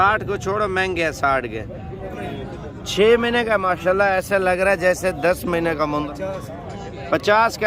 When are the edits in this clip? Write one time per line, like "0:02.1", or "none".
0:02.1
0:06.1